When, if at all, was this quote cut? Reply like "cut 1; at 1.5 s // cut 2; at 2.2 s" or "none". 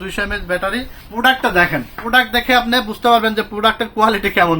cut 1; at 1.0 s